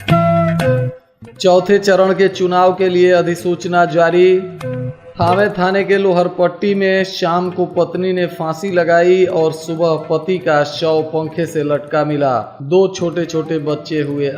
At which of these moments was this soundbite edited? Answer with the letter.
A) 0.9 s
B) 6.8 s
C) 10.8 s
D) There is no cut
A